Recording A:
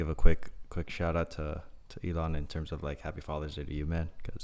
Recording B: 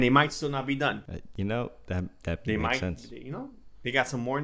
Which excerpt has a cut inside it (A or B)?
B